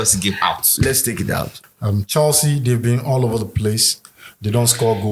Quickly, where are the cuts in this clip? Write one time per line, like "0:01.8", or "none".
0:01.6